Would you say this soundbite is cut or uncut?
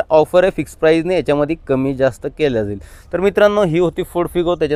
uncut